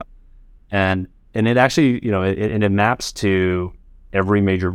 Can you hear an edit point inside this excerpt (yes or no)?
no